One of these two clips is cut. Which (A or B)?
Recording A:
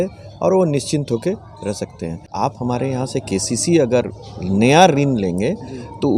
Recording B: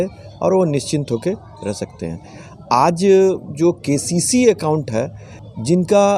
A